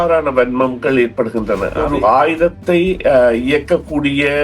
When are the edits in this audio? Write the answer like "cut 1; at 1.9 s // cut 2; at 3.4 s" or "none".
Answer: cut 1; at 1.7 s